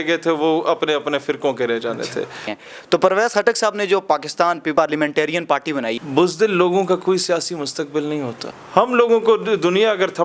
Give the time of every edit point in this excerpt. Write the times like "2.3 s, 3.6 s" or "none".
2.6 s, 5.9 s, 8.5 s